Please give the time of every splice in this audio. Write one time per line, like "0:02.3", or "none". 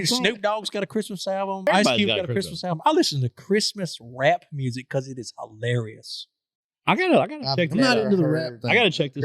0:01.7

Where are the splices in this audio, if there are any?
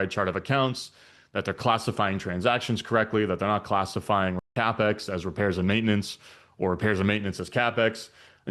0:04.5

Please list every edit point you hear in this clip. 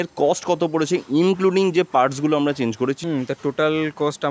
0:03.0

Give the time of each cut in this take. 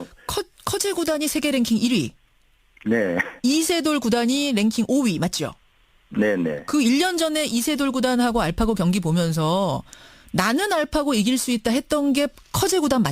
0:12.2

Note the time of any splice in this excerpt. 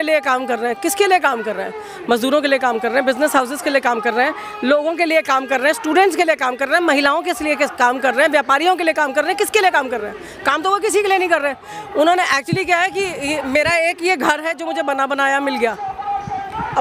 none

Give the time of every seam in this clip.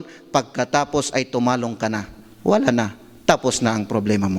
none

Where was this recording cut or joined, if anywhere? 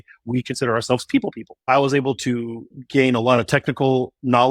0:01.7
0:02.8

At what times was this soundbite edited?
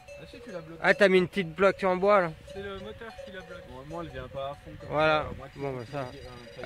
none

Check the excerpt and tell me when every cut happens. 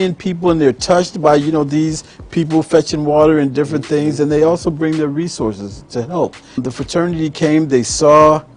0:06.6

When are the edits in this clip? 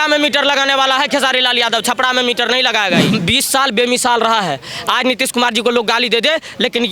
0:03.1

